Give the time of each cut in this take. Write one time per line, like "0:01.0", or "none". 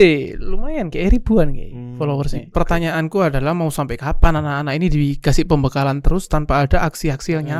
0:02.4